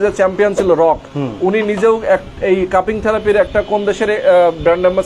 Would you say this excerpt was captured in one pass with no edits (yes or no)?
yes